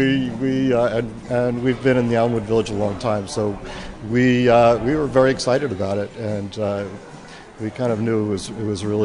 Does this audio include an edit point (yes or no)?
no